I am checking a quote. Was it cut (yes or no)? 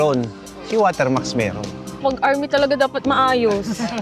yes